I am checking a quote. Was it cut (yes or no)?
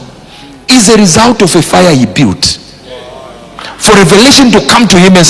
no